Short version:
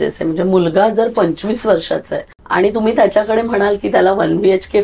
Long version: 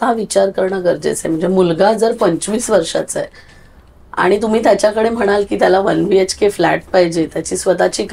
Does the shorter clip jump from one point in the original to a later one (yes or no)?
yes